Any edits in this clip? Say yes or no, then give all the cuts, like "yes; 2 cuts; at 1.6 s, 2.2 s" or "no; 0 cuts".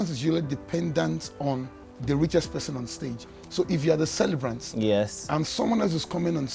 no; 0 cuts